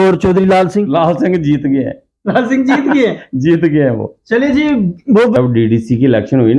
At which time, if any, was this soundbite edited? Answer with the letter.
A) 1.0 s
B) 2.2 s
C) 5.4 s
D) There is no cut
C